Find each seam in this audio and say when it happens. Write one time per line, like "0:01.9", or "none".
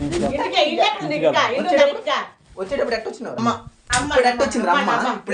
0:03.4